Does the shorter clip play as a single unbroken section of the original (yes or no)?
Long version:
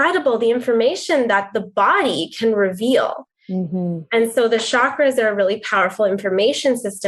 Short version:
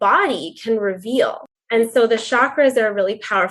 no